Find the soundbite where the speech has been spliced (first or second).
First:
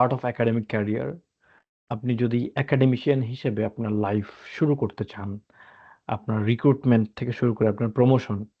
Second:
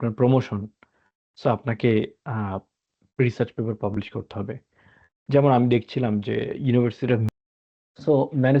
second